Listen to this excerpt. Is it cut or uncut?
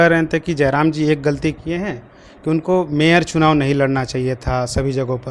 uncut